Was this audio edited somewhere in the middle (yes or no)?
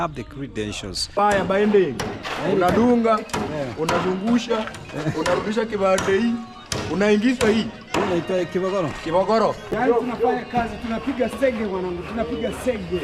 yes